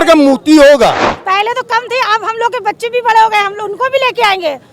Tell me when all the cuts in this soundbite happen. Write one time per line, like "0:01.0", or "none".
0:01.1